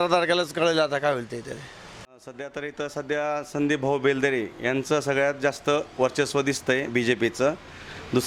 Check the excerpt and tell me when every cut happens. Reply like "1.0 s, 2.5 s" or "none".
2.1 s